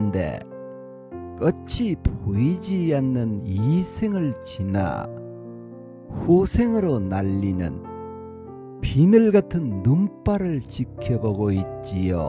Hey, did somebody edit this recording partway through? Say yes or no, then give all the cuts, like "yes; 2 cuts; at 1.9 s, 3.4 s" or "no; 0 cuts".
yes; 2 cuts; at 7.7 s, 8.9 s